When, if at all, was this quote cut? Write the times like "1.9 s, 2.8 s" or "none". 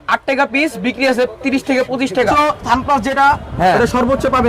2.3 s